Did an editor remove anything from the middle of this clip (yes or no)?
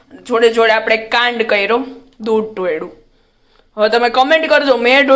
no